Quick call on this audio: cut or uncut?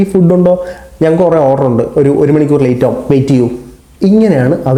uncut